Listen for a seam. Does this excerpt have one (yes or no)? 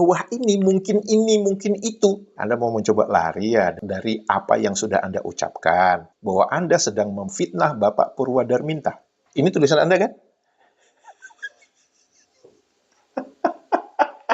yes